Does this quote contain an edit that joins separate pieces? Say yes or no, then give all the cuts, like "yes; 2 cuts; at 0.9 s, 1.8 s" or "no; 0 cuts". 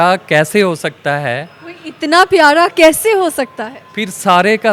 no; 0 cuts